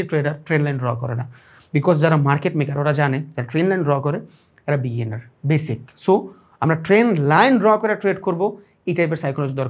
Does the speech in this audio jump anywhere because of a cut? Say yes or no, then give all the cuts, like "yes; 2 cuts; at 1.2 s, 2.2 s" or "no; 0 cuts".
no; 0 cuts